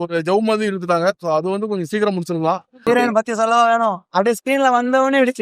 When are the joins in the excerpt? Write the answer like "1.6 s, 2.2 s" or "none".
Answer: 2.8 s